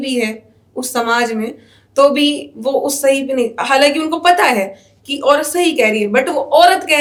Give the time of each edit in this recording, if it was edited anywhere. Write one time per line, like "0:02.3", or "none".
none